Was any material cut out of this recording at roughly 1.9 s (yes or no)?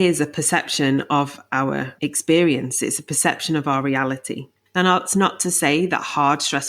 yes